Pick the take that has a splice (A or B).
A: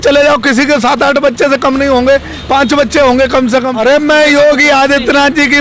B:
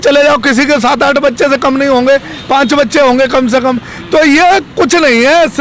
A